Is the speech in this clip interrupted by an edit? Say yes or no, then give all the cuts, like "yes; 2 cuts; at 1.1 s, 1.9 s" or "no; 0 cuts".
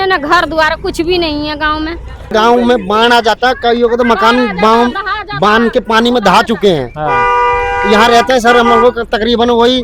yes; 1 cut; at 2.3 s